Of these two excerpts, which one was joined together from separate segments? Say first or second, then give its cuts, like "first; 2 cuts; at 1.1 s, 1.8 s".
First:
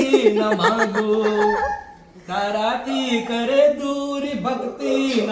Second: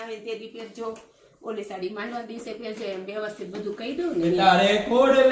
second; 1 cut; at 4.4 s